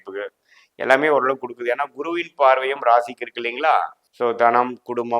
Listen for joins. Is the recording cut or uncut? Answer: cut